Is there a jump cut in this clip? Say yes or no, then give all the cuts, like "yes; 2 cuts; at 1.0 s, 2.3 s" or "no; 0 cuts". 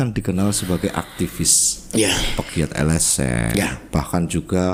no; 0 cuts